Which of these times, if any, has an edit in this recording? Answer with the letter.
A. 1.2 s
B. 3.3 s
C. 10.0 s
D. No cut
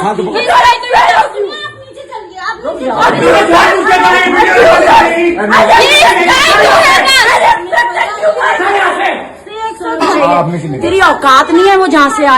C